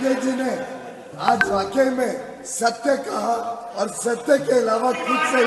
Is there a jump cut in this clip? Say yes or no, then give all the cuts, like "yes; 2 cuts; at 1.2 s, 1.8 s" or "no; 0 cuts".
no; 0 cuts